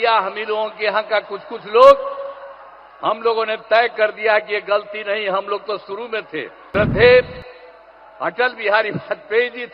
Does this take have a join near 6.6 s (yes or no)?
yes